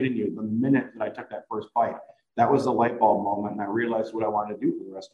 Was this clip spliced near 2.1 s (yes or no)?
no